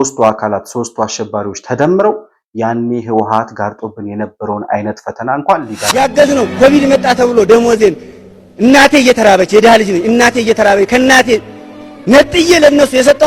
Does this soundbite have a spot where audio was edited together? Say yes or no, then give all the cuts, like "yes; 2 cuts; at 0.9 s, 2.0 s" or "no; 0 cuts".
yes; 1 cut; at 5.9 s